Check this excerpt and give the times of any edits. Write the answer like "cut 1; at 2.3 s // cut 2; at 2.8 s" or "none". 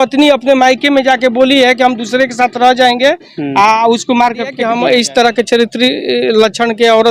cut 1; at 4.6 s